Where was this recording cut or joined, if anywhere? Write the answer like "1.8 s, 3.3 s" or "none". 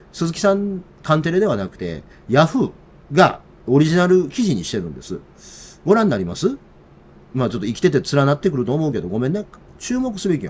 9.6 s